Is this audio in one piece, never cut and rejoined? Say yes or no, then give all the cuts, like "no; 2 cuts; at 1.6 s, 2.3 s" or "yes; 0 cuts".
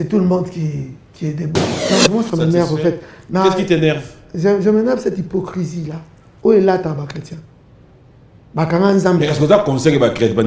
no; 1 cut; at 1.8 s